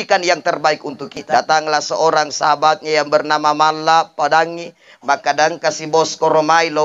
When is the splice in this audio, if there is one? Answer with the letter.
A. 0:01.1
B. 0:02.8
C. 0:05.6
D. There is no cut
A